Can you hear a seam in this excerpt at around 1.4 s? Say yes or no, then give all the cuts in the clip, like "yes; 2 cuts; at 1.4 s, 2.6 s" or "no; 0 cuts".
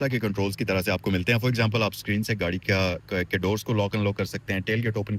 no; 0 cuts